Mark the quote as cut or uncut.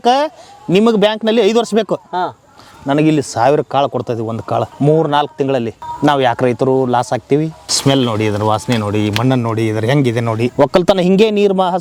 cut